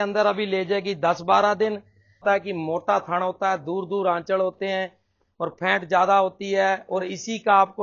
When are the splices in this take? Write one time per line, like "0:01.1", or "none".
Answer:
0:02.2